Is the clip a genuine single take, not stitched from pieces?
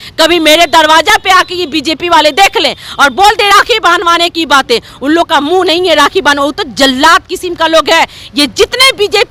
yes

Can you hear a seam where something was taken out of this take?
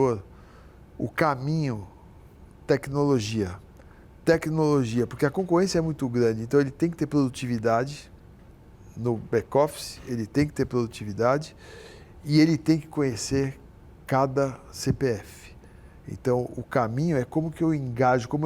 no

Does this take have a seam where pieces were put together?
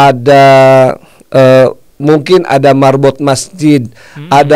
no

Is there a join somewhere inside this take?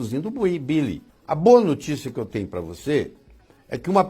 yes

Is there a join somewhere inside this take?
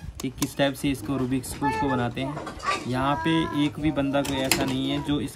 no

